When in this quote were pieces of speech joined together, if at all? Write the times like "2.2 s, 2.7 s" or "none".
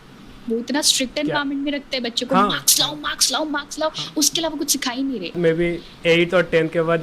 5.4 s